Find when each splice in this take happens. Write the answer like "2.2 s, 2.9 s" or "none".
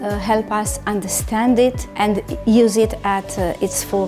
1.9 s

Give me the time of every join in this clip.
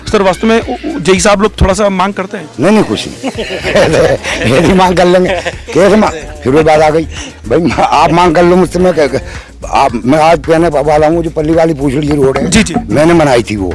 none

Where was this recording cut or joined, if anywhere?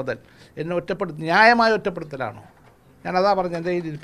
none

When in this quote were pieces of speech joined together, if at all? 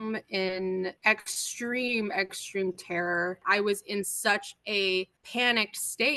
1.0 s, 3.4 s, 5.2 s

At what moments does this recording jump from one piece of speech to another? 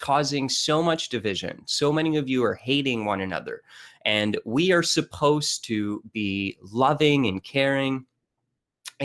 7.7 s

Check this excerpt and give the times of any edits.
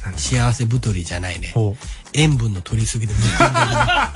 1.6 s

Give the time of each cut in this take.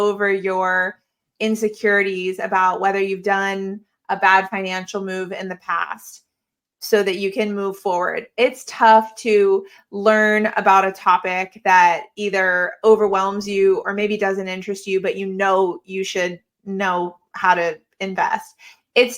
none

